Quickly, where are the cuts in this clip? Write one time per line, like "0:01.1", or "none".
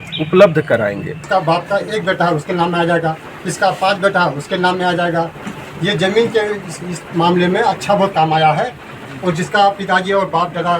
0:01.1